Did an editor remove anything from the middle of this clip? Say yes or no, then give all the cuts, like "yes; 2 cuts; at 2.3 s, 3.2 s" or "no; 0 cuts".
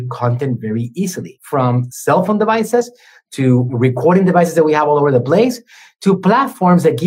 yes; 2 cuts; at 1.6 s, 3.7 s